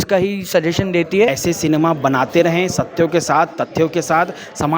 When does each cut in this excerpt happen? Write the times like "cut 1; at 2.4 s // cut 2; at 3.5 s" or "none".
cut 1; at 1.3 s